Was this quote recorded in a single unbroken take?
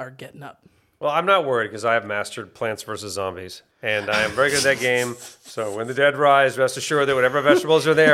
yes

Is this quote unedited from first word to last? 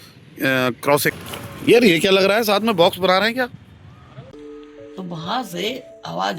no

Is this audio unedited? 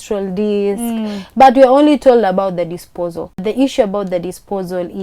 no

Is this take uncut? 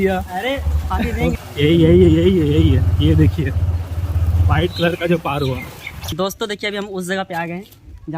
no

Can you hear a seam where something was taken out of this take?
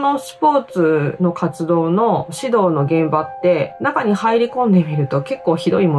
no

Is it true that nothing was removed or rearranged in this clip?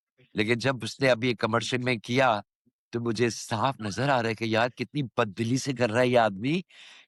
yes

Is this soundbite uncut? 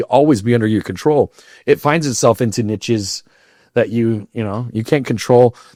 yes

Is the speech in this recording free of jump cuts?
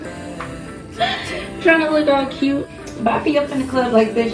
no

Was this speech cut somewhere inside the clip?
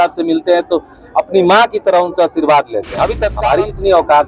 yes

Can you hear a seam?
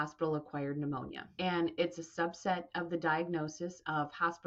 yes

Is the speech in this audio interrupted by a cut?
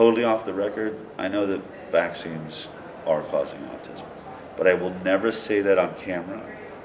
no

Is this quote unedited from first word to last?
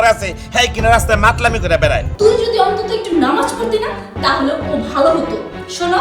no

